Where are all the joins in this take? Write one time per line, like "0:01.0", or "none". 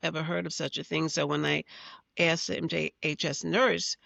none